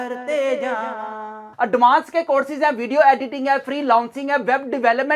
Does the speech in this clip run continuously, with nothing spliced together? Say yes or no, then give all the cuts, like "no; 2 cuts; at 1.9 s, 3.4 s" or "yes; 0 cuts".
no; 1 cut; at 1.5 s